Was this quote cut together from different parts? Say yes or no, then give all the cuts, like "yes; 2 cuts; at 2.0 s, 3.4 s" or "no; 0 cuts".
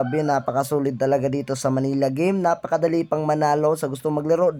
no; 0 cuts